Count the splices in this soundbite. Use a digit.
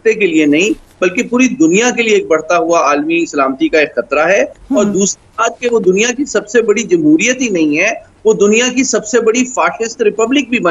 0